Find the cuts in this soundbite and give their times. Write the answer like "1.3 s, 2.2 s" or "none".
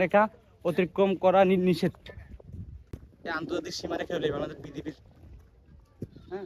2.9 s